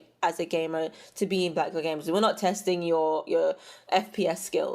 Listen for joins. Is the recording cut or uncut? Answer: cut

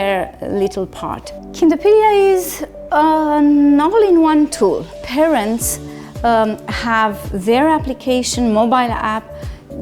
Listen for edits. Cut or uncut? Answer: cut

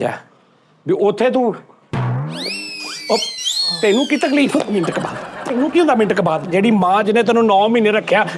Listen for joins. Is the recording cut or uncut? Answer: cut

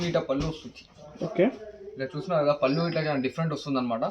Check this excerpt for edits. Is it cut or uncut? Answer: uncut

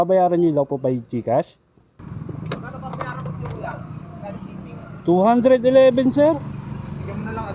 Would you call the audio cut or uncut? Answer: cut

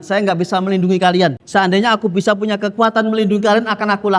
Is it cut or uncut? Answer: cut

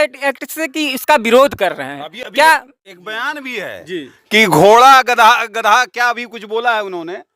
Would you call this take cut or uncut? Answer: uncut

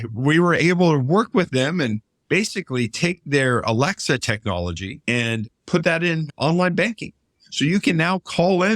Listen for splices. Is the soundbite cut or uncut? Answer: cut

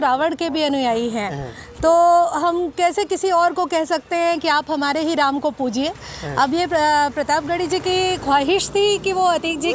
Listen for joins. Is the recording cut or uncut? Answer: uncut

